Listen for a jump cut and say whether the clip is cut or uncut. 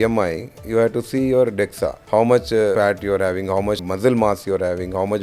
cut